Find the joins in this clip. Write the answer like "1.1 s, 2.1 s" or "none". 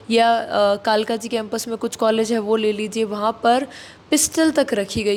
none